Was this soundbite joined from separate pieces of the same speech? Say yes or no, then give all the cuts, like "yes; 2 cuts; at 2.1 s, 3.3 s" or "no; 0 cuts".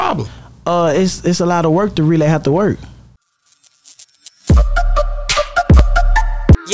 yes; 1 cut; at 3.0 s